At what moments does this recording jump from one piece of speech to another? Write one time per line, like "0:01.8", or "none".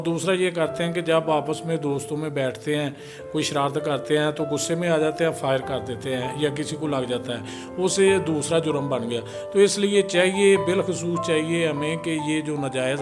none